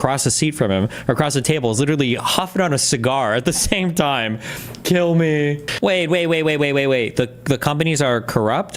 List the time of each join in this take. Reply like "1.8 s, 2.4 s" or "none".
5.7 s